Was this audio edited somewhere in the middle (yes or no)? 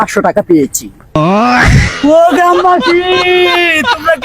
yes